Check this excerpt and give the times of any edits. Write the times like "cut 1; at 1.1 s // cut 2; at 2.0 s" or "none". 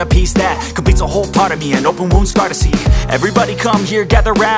none

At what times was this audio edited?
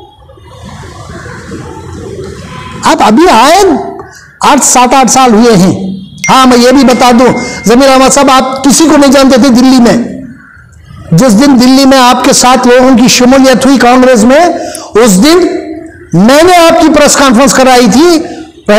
none

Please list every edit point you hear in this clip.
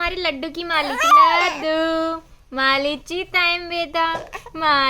none

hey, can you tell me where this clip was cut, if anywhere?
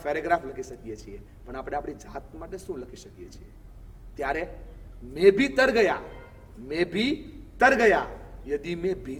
none

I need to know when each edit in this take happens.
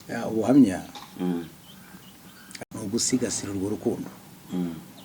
cut 1; at 2.6 s

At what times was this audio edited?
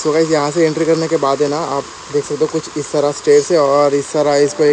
none

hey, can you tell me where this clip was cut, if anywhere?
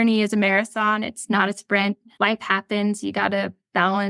cut 1; at 2.1 s

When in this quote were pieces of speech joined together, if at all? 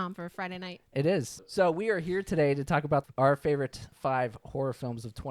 cut 1; at 1.4 s // cut 2; at 3.1 s // cut 3; at 3.9 s

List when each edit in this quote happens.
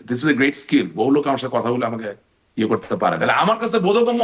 cut 1; at 3.2 s

